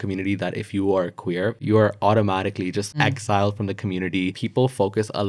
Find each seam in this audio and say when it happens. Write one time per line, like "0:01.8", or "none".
0:01.6
0:02.9
0:04.3